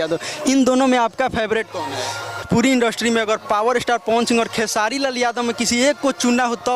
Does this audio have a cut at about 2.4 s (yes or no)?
yes